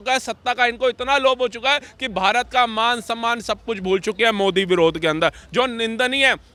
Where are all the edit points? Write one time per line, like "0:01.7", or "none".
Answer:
none